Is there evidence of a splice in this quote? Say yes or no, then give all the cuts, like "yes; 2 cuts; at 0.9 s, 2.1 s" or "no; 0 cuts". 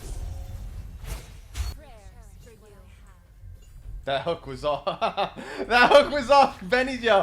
yes; 1 cut; at 1.7 s